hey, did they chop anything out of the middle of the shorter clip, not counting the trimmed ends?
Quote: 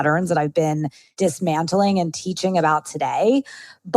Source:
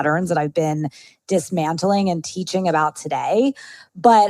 yes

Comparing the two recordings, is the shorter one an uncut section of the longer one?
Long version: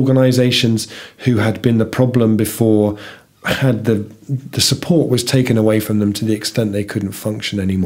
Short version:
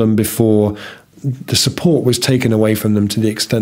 no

